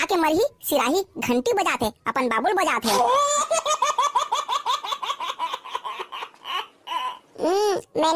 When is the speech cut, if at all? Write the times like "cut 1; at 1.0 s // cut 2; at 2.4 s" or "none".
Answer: none